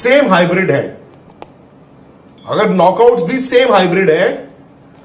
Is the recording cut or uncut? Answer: uncut